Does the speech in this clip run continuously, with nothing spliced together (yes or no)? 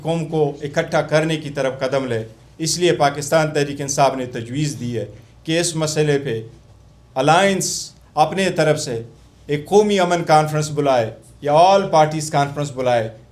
yes